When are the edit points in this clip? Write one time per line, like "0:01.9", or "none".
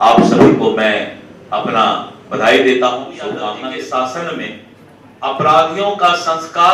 0:03.4